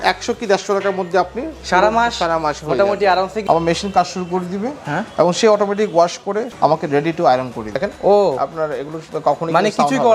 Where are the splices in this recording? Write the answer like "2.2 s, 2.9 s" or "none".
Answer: 3.4 s, 6.5 s, 7.7 s